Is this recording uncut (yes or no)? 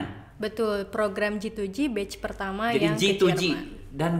yes